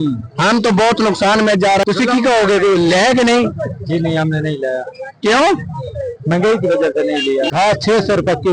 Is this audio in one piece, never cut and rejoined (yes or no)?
no